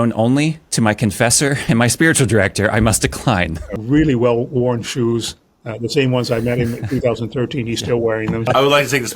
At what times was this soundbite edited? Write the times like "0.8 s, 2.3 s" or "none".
3.7 s, 8.5 s

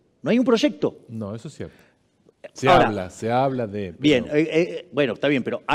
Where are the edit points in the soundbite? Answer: none

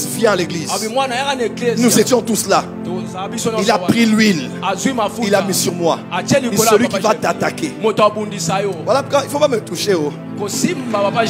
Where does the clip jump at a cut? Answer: none

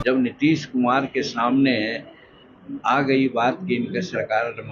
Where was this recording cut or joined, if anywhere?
none

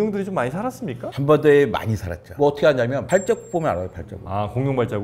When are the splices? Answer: none

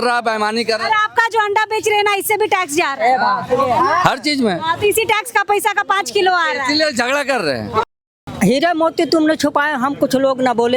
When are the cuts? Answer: 8.0 s

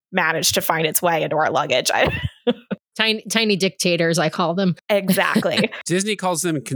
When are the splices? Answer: 5.8 s

